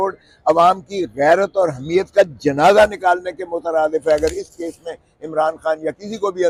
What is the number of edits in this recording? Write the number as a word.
zero